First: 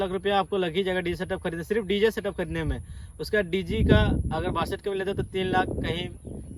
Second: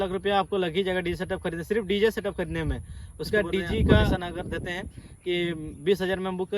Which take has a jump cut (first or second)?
second